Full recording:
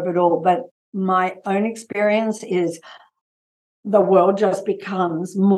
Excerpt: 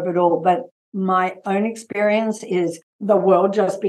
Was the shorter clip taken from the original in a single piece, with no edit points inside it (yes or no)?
no